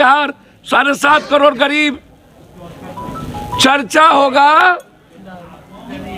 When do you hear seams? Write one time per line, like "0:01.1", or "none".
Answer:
none